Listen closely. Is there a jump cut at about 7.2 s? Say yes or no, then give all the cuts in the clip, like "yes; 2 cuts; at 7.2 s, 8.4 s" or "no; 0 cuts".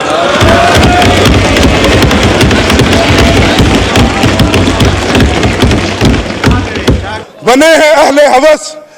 yes; 1 cut; at 7.2 s